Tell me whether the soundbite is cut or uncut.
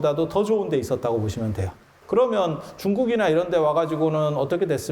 cut